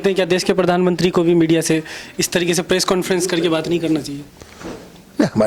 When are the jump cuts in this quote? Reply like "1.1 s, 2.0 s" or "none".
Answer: none